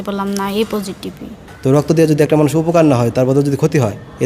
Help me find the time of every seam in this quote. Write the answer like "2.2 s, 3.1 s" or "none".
1.9 s

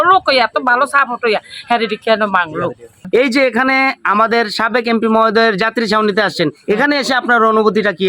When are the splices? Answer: 2.9 s

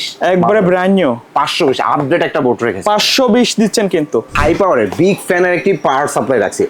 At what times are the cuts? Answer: 4.3 s

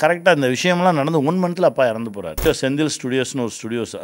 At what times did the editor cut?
2.5 s

